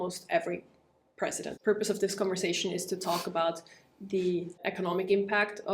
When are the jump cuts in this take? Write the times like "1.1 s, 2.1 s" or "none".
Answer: 1.5 s, 4.6 s